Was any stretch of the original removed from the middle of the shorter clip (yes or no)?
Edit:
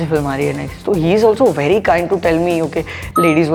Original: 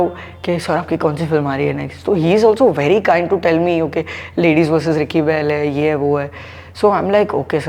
no